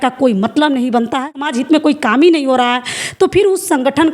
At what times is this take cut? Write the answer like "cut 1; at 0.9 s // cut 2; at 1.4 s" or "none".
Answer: cut 1; at 1.4 s